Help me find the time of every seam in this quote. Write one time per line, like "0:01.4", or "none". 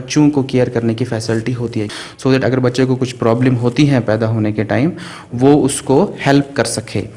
0:01.9